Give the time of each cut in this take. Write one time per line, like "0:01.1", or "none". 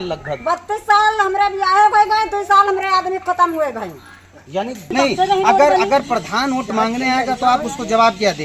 0:04.9